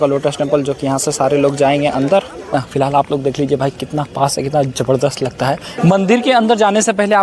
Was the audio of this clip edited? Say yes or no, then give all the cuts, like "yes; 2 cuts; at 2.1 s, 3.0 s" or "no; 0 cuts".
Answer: yes; 2 cuts; at 2.5 s, 5.7 s